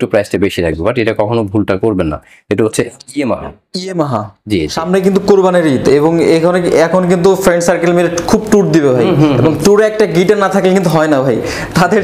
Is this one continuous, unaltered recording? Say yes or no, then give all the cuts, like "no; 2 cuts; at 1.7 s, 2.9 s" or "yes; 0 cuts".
no; 1 cut; at 4.8 s